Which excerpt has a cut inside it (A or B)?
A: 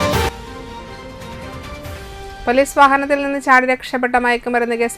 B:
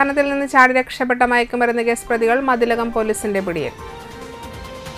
A